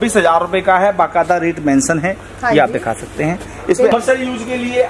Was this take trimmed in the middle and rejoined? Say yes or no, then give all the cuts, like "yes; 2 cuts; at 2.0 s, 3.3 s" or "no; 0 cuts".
yes; 1 cut; at 3.9 s